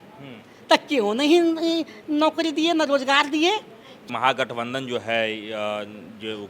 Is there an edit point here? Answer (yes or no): yes